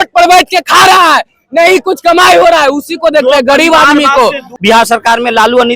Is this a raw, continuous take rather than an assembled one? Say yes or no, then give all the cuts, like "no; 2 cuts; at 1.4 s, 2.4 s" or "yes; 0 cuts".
no; 1 cut; at 4.5 s